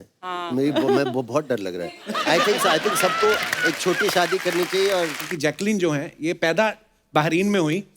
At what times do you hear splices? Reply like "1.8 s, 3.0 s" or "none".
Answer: 5.3 s